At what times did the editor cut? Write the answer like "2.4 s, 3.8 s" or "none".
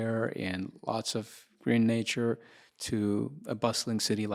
none